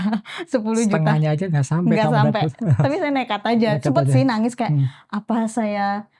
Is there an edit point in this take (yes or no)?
no